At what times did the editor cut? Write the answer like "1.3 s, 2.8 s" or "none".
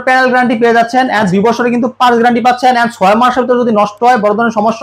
none